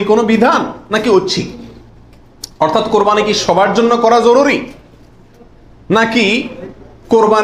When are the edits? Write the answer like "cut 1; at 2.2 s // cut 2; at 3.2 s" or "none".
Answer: none